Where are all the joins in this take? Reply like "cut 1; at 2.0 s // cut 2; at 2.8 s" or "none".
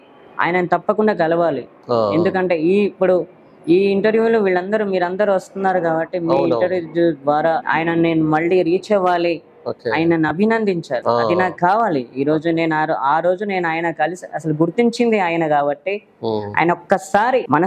none